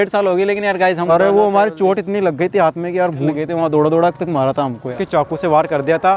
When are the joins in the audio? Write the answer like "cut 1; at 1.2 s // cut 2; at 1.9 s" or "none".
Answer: cut 1; at 1.1 s // cut 2; at 3.3 s // cut 3; at 4.9 s